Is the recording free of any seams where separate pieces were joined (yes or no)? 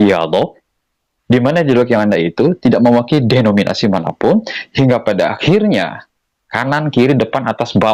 yes